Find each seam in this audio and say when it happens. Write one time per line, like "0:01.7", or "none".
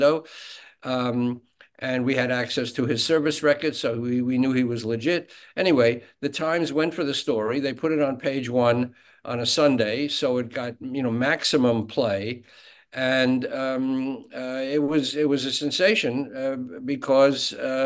none

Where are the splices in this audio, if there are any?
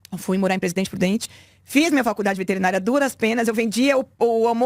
none

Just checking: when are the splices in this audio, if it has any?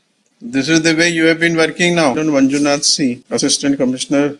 0:02.2
0:03.2

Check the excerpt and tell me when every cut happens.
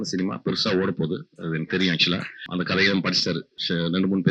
0:02.4
0:03.5

